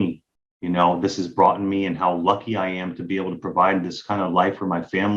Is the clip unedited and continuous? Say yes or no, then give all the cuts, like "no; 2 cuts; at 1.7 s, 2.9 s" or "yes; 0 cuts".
yes; 0 cuts